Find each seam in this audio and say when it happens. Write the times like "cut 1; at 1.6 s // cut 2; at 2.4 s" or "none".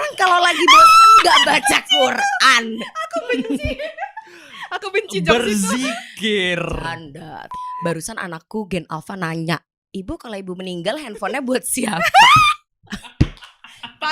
cut 1; at 7.4 s